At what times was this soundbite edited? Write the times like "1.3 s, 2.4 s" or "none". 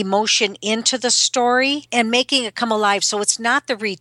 1.8 s

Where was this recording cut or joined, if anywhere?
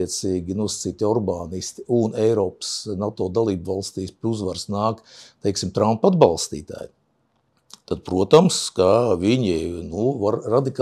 none

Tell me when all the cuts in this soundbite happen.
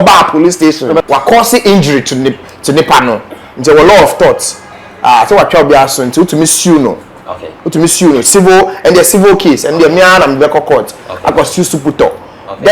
1.0 s

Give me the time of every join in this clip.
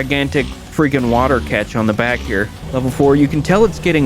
2.5 s

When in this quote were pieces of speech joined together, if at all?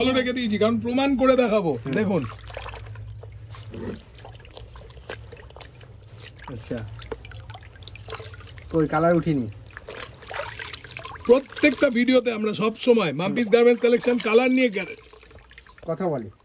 none

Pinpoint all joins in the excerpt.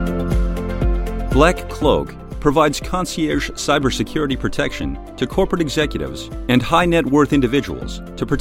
1.3 s

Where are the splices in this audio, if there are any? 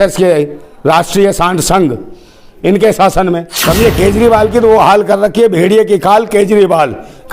3.5 s

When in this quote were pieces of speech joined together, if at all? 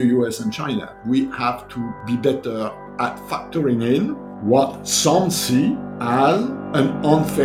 0.9 s, 2.0 s, 3.2 s, 4.3 s, 5.9 s, 6.6 s

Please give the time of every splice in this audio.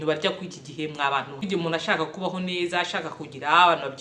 1.4 s

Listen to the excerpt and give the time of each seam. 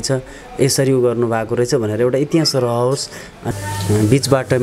3.3 s

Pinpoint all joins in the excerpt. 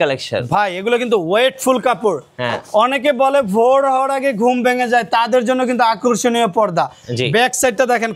none

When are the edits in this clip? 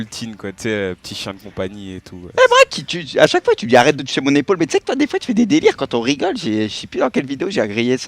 4.4 s

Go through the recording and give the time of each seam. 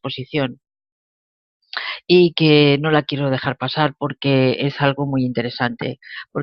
1.0 s

